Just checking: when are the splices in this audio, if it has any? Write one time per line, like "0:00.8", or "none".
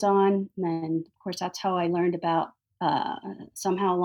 0:02.6